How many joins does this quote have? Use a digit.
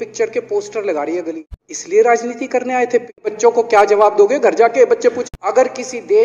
3